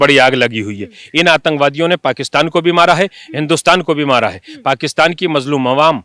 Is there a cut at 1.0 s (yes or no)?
no